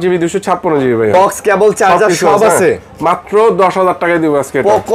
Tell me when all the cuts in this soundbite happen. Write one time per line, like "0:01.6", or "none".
0:01.1